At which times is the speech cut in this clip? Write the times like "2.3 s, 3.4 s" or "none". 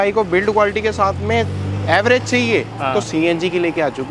none